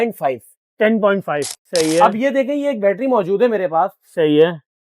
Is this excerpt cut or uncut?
cut